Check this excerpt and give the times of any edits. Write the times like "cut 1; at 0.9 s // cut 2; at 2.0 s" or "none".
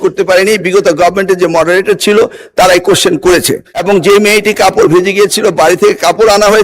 cut 1; at 3.7 s